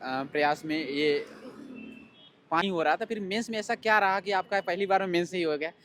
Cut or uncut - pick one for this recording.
cut